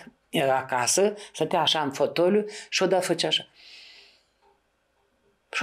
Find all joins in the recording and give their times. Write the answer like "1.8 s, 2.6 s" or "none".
none